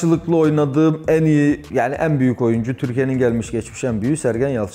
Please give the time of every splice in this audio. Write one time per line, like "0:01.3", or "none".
none